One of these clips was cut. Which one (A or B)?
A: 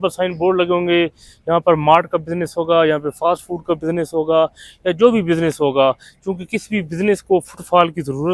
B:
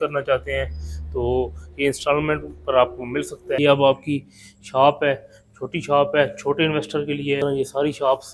B